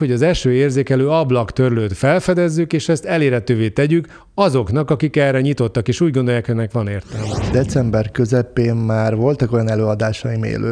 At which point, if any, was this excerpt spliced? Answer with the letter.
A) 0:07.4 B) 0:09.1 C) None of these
A